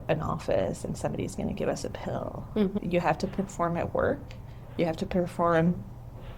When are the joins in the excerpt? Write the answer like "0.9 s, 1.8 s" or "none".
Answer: 2.7 s